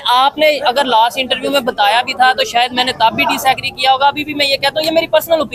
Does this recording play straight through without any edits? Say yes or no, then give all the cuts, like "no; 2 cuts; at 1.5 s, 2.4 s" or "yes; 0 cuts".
yes; 0 cuts